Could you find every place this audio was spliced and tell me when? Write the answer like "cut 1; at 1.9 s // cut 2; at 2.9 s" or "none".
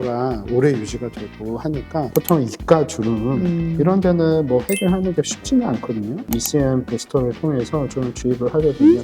cut 1; at 2.1 s